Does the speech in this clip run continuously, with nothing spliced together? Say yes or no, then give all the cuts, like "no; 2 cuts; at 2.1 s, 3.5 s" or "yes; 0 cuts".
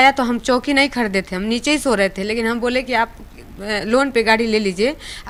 yes; 0 cuts